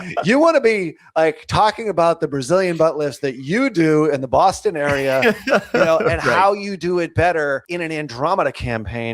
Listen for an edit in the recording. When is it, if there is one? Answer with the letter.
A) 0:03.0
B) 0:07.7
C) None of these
B